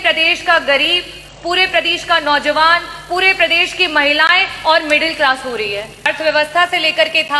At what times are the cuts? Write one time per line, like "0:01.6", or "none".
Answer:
0:06.1